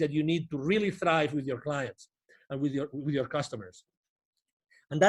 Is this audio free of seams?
yes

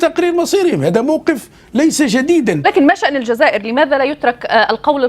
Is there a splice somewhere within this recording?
yes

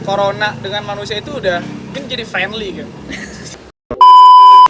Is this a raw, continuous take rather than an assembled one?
no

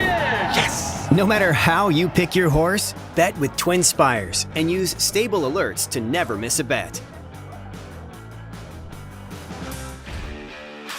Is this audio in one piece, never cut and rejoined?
no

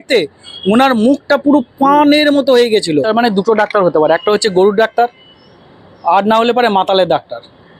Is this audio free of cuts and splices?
no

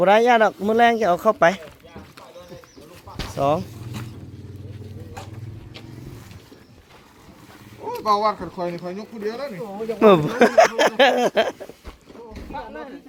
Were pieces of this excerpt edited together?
no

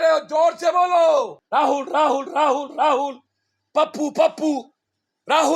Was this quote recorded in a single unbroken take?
no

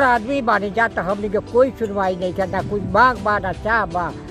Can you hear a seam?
no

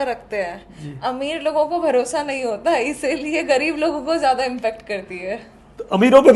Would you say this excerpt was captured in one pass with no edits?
yes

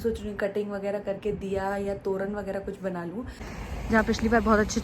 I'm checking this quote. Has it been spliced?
yes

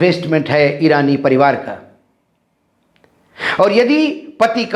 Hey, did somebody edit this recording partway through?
no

